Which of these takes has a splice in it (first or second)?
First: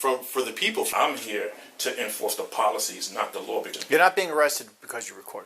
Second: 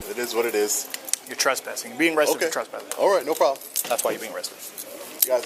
first